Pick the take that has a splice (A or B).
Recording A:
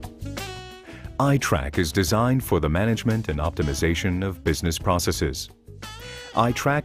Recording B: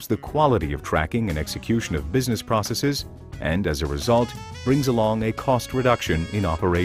A